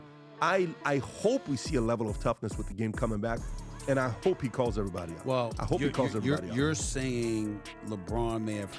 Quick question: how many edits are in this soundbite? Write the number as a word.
zero